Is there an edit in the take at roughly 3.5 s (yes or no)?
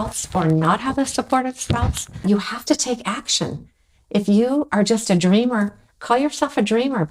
no